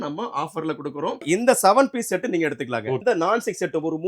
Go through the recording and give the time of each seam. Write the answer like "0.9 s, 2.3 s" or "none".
1.2 s, 3.0 s

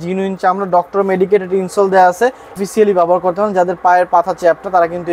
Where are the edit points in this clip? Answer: 2.6 s

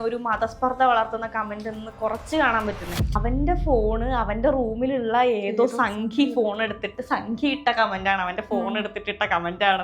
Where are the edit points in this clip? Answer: 3.1 s

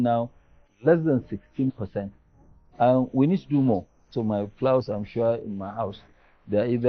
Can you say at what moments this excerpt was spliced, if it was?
4.1 s

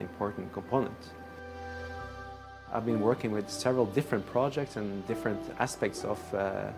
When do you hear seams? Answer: none

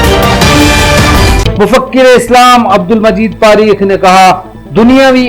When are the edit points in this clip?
none

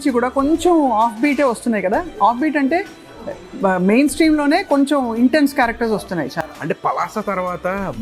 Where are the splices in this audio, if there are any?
none

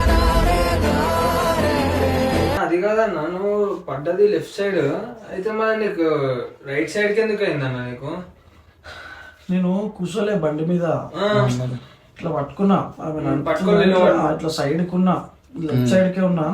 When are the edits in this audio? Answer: 2.6 s

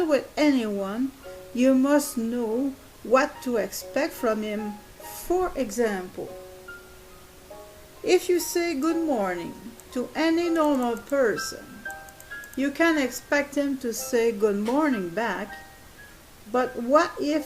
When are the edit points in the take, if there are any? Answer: 2.0 s

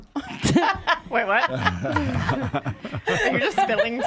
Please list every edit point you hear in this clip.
none

